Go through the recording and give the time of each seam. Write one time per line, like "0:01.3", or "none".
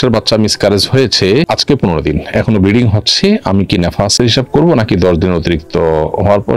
none